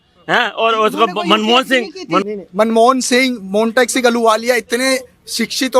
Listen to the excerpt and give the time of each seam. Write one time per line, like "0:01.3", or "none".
0:02.2